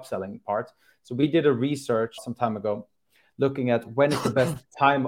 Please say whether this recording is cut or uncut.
cut